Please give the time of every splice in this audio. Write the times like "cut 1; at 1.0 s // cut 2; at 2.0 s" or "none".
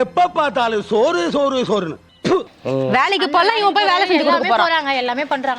cut 1; at 2.5 s